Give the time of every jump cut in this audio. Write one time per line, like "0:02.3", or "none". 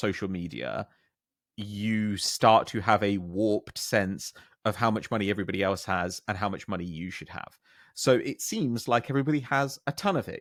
none